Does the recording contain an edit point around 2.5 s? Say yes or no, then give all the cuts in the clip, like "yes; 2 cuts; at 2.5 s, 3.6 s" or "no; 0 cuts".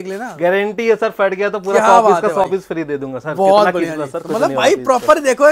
no; 0 cuts